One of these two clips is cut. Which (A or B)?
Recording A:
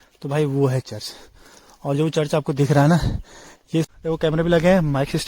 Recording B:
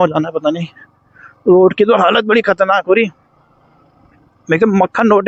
A